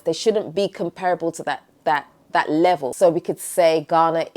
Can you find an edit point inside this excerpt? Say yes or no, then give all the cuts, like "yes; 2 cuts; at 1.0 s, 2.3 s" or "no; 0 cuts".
yes; 1 cut; at 2.9 s